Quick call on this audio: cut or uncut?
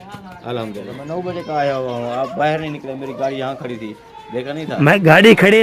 cut